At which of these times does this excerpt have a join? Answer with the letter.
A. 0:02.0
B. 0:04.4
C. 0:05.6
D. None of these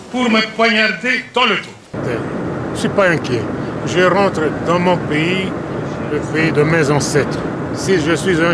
A